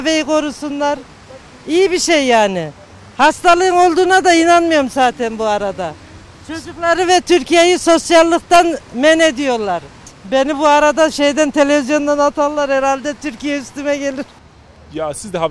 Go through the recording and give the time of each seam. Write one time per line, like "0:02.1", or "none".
0:10.0
0:14.3

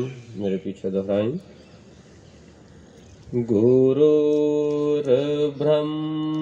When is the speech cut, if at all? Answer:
none

